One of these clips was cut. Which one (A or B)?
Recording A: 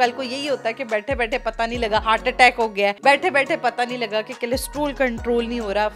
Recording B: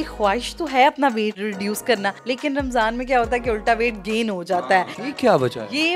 B